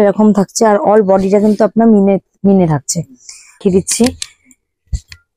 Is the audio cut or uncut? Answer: cut